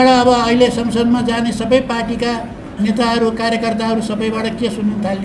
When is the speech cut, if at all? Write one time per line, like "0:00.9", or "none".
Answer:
none